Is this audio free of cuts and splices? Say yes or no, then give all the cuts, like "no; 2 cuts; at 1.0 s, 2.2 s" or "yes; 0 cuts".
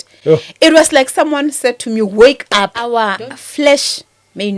no; 1 cut; at 2.8 s